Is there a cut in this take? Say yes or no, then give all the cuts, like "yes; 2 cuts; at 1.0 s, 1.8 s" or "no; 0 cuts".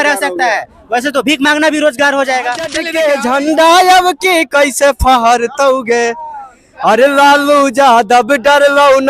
yes; 1 cut; at 2.8 s